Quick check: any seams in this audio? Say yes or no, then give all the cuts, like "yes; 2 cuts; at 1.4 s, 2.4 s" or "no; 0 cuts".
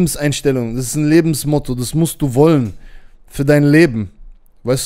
no; 0 cuts